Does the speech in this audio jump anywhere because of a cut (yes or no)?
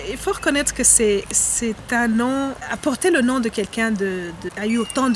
yes